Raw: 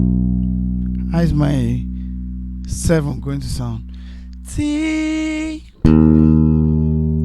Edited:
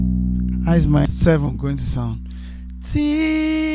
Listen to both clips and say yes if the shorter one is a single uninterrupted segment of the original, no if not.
no